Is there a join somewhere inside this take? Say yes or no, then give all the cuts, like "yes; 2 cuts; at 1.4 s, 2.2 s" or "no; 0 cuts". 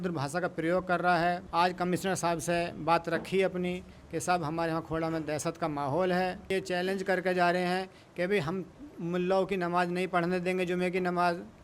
yes; 2 cuts; at 1.4 s, 6.5 s